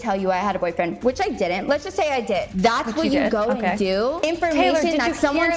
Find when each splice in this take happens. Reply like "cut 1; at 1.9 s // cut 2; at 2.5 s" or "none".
cut 1; at 2.5 s // cut 2; at 4.3 s